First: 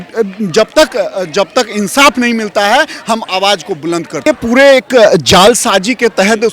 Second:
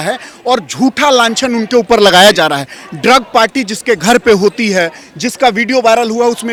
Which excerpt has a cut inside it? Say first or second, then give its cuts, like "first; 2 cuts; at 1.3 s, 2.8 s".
first; 1 cut; at 4.3 s